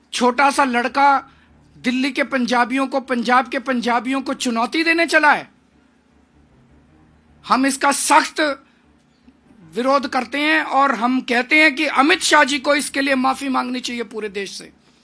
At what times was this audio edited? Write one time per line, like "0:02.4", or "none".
none